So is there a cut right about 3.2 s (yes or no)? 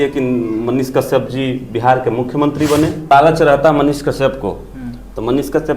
yes